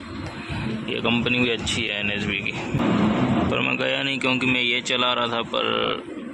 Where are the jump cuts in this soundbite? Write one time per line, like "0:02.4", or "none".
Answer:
0:02.8